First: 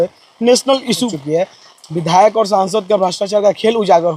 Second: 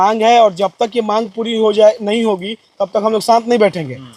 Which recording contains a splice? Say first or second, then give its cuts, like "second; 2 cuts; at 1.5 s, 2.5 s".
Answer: first; 1 cut; at 1.1 s